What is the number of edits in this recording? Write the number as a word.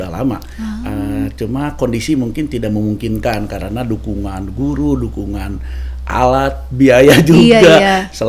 zero